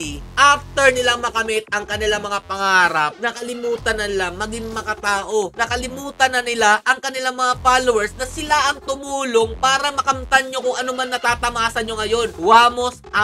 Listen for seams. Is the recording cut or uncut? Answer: uncut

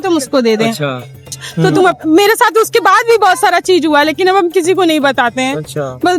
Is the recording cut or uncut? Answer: cut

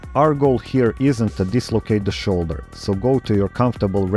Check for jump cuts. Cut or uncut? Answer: uncut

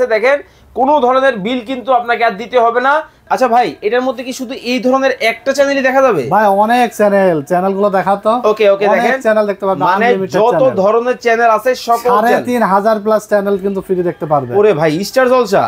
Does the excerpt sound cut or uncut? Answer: cut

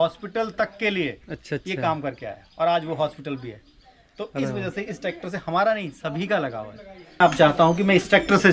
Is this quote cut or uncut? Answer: cut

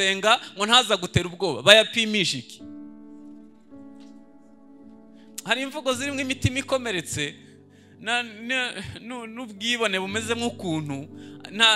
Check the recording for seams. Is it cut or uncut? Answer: uncut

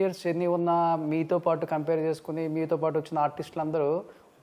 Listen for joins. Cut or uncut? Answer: uncut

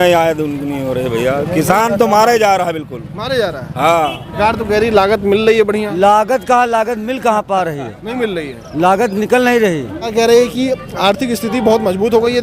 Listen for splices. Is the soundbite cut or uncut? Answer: cut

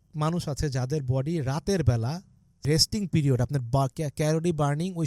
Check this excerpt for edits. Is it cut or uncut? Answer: cut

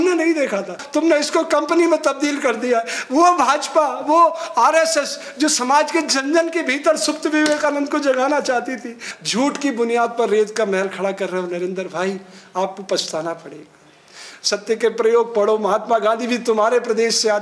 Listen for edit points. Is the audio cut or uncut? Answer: uncut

